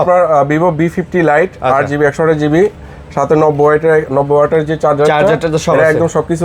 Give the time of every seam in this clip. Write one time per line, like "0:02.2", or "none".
none